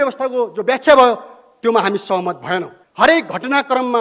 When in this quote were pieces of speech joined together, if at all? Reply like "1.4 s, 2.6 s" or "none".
2.8 s